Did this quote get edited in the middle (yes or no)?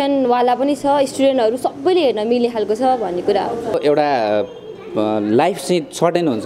yes